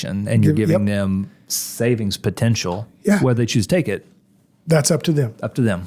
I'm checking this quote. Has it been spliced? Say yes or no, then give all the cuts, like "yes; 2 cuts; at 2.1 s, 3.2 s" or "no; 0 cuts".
no; 0 cuts